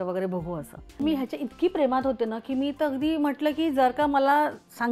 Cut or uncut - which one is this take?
cut